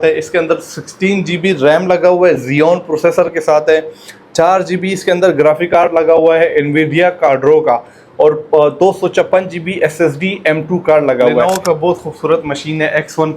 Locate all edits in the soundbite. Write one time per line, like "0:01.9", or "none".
0:11.4